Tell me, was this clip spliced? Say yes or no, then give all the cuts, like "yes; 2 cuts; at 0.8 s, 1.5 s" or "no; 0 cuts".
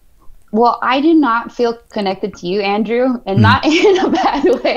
no; 0 cuts